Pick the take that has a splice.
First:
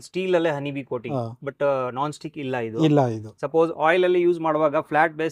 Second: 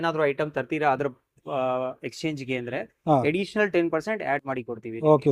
first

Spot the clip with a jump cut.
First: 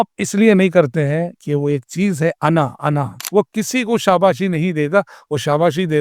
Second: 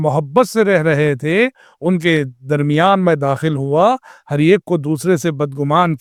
first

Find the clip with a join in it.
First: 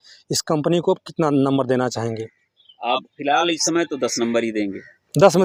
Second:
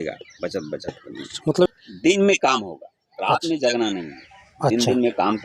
second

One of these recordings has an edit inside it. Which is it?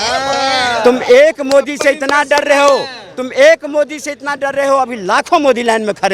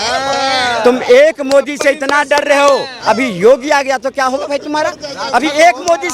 second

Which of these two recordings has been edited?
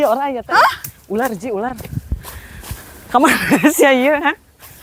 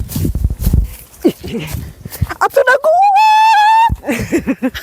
second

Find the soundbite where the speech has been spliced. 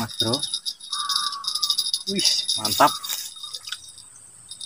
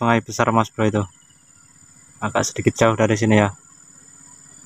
first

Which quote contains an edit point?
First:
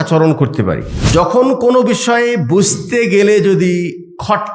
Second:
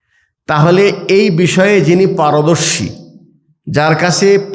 first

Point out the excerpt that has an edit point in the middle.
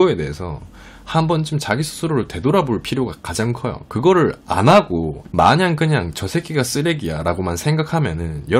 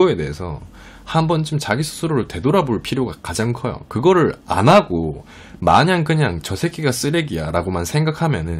first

